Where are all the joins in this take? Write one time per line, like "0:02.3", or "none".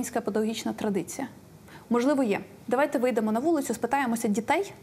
none